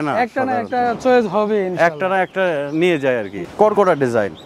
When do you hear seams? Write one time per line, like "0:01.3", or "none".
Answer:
0:03.4